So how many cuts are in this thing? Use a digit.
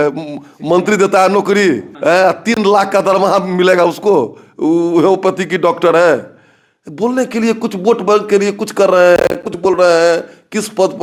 0